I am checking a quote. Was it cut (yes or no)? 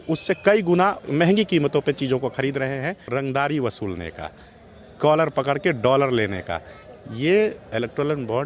yes